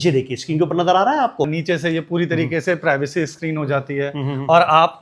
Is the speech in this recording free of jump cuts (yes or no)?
no